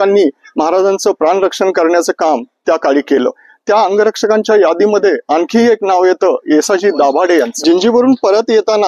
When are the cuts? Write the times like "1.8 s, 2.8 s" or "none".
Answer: 7.5 s